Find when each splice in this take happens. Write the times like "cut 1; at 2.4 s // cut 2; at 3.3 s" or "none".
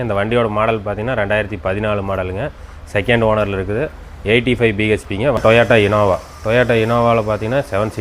cut 1; at 5.4 s

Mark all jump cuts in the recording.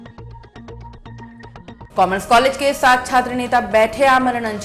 cut 1; at 1.8 s

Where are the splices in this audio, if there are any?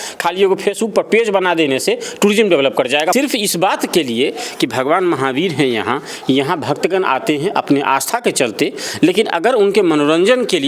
cut 1; at 3.1 s

